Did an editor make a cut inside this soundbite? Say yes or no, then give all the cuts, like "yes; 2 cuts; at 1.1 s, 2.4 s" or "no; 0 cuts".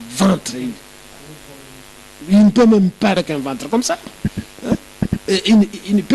yes; 1 cut; at 3.2 s